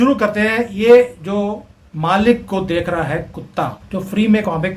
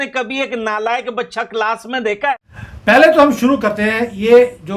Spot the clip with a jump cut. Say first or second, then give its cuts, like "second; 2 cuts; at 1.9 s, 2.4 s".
second; 1 cut; at 2.4 s